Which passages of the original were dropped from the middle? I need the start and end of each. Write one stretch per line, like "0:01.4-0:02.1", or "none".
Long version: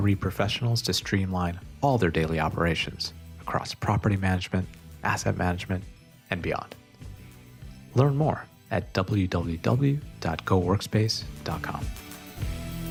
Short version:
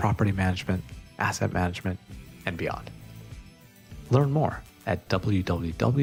none

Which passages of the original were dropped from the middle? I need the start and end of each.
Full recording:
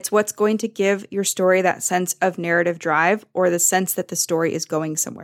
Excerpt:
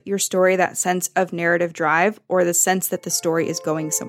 none

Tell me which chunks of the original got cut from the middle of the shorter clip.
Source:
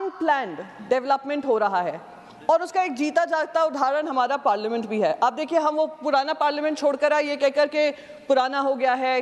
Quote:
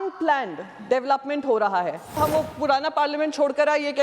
0:02.2-0:05.6

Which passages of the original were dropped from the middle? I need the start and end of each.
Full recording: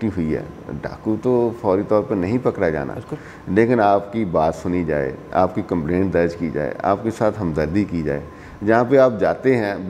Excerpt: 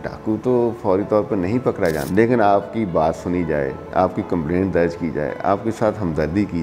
0:02.8-0:03.4

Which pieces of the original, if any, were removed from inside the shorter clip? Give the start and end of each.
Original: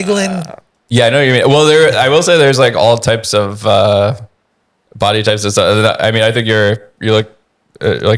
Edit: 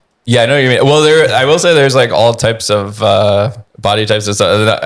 0:04.3-0:04.8

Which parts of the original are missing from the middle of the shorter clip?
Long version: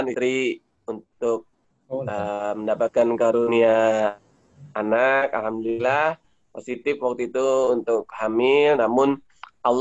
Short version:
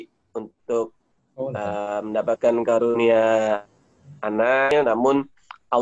0:05.2-0:08.6

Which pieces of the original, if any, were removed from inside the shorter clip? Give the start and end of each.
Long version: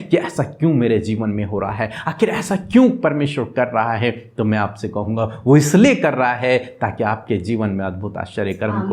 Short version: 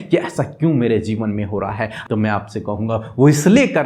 0:02.0-0:04.2

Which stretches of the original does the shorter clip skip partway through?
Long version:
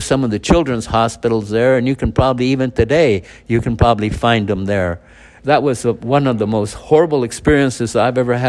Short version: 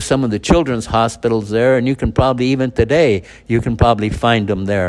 none

